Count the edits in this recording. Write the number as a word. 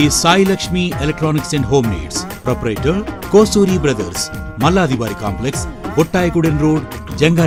zero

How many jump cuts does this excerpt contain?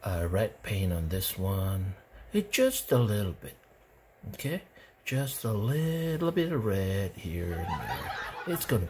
zero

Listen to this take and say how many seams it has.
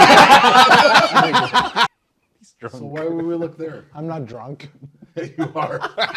one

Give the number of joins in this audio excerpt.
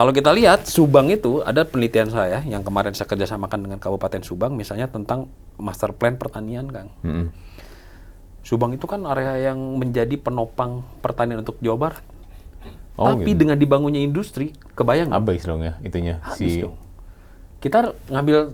zero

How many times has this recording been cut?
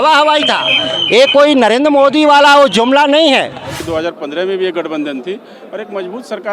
one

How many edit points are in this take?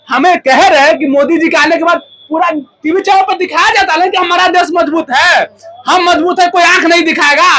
zero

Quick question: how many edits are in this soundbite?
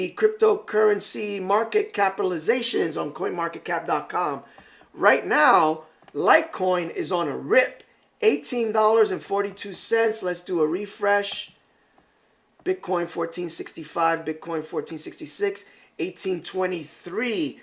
zero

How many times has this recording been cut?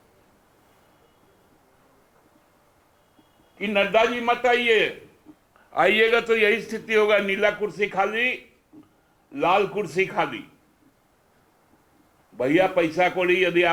zero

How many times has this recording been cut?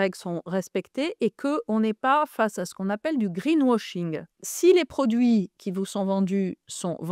one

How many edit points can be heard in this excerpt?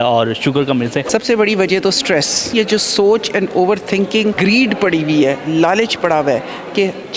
three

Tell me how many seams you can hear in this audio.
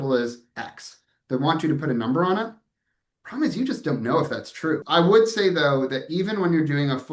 one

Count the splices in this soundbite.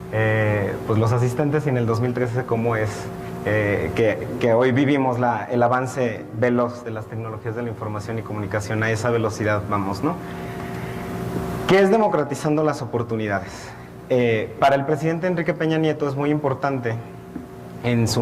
one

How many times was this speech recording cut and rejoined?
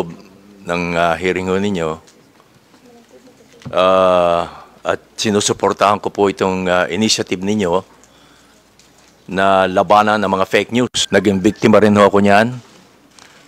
one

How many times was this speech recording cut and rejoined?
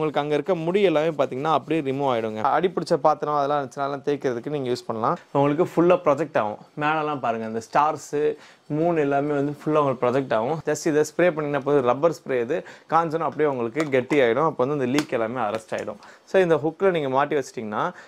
four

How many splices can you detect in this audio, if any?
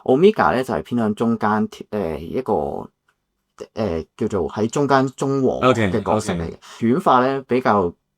one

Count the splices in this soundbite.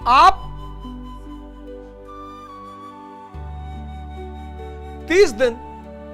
two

